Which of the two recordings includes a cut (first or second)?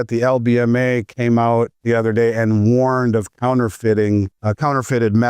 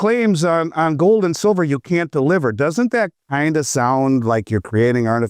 first